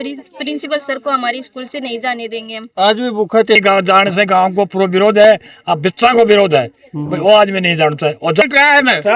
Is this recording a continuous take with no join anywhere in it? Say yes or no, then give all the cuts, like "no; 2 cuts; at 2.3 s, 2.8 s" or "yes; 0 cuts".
no; 2 cuts; at 3.6 s, 8.4 s